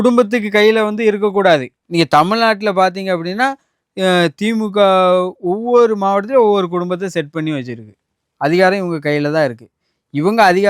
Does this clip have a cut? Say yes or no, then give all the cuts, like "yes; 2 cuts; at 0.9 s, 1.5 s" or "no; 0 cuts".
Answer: no; 0 cuts